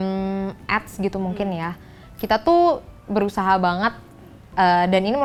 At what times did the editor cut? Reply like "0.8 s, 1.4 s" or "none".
none